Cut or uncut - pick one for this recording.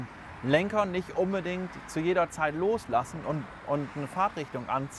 uncut